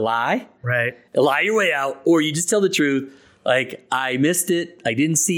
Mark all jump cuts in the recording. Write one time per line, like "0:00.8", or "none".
none